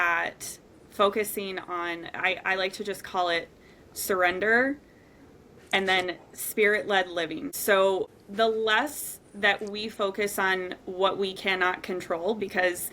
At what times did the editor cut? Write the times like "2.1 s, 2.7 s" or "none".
7.5 s, 8.1 s